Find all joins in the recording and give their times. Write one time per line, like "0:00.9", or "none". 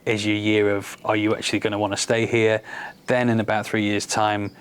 none

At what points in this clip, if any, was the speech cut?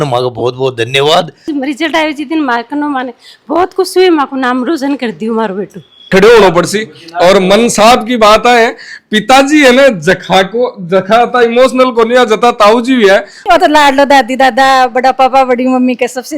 0:01.4
0:06.1
0:13.4

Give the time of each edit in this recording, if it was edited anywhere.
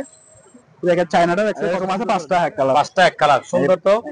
0:01.8

